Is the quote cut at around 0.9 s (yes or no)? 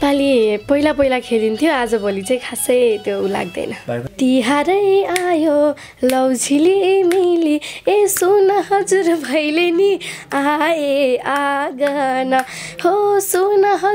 no